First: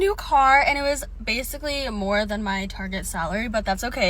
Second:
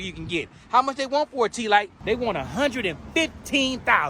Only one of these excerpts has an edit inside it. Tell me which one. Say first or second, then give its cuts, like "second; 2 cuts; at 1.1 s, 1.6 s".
second; 1 cut; at 1.9 s